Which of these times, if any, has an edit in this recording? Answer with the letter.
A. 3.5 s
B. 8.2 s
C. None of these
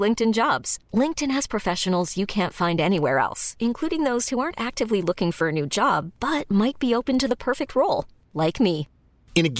C